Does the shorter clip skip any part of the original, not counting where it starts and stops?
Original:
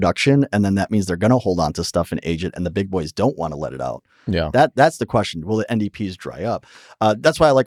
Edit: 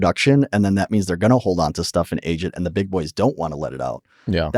no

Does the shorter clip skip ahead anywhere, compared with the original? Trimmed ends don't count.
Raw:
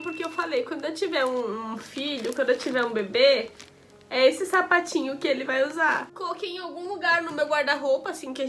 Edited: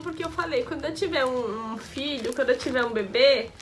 no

